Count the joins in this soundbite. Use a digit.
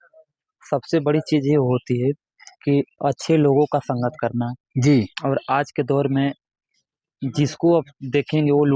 0